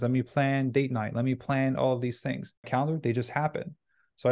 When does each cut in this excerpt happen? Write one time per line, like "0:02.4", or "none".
0:02.7